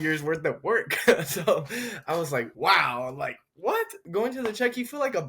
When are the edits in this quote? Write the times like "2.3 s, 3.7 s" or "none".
2.5 s, 4.0 s